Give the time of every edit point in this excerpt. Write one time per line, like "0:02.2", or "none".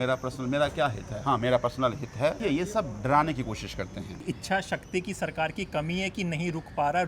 0:02.4
0:04.2